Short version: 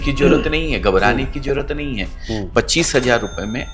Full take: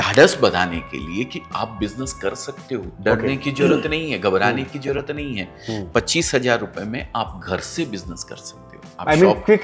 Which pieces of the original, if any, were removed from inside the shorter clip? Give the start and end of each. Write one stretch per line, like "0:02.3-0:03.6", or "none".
none